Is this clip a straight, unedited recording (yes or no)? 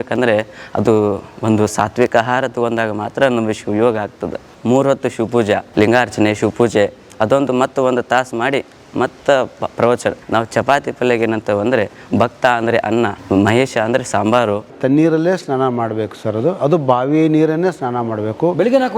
no